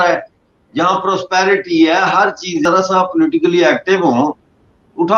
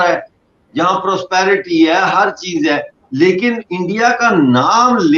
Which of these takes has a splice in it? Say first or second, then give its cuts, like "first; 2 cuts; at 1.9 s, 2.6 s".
first; 1 cut; at 2.7 s